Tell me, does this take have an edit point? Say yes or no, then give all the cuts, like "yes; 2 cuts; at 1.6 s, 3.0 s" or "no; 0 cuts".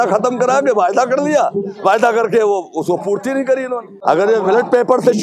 yes; 1 cut; at 3.9 s